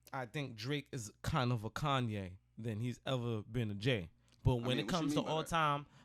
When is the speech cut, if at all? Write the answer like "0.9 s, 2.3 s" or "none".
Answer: none